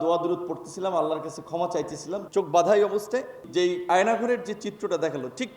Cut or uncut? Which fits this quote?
cut